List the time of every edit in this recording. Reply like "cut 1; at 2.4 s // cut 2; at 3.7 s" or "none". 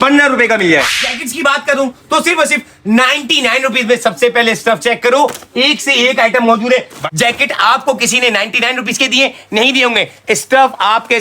cut 1; at 0.9 s // cut 2; at 7.0 s